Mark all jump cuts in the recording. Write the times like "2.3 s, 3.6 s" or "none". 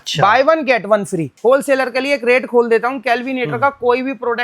1.3 s

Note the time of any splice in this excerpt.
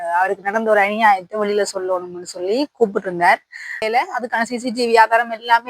3.8 s

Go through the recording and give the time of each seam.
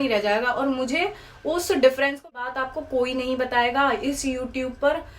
2.5 s

